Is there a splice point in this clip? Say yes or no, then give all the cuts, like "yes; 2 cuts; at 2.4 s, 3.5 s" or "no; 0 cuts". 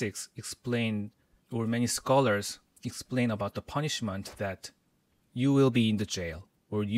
no; 0 cuts